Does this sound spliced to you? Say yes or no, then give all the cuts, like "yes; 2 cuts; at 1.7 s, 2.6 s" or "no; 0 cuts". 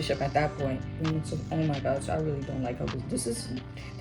yes; 1 cut; at 1.0 s